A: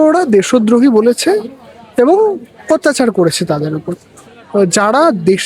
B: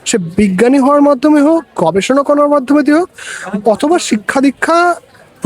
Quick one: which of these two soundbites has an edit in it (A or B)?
A